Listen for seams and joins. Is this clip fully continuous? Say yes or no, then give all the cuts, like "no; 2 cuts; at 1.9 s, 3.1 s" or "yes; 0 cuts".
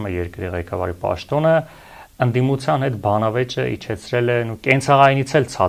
yes; 0 cuts